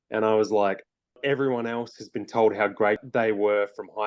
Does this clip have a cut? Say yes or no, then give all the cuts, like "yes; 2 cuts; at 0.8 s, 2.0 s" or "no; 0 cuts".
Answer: yes; 2 cuts; at 1.2 s, 3.0 s